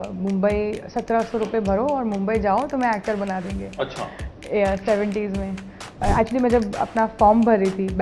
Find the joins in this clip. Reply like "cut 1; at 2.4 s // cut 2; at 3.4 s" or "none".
cut 1; at 6.0 s